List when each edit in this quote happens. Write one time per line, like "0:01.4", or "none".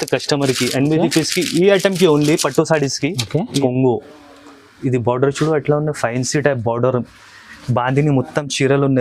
0:03.5